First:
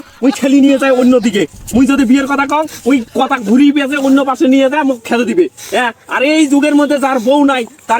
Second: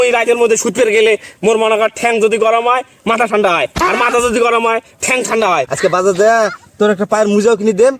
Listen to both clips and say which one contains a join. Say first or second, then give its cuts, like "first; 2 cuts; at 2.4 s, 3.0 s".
second; 1 cut; at 5.7 s